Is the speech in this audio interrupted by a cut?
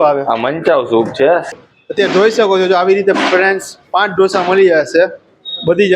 yes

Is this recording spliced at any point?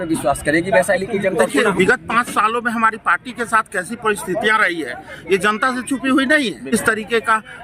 yes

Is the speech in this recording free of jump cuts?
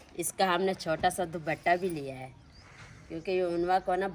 yes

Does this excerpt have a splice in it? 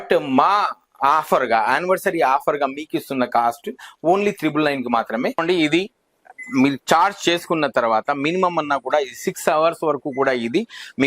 yes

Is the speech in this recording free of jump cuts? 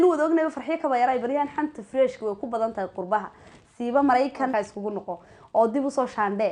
no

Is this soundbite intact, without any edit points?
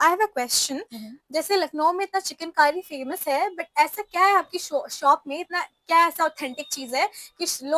yes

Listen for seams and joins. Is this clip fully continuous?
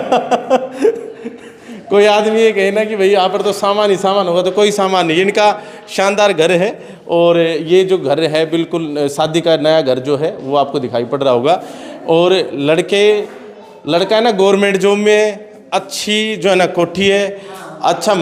yes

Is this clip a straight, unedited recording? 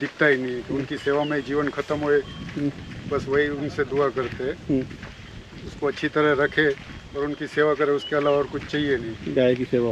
yes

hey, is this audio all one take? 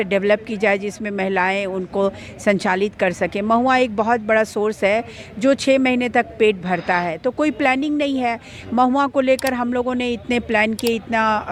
yes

